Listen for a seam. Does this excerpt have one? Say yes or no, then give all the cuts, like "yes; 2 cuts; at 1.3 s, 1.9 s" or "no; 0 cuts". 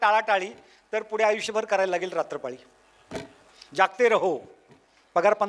no; 0 cuts